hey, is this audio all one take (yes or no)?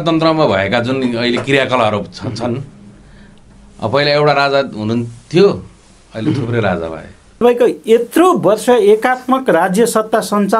no